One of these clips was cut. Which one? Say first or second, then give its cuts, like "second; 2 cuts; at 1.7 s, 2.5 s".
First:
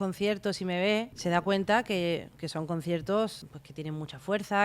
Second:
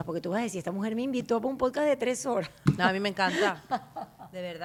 first; 2 cuts; at 1.1 s, 3.4 s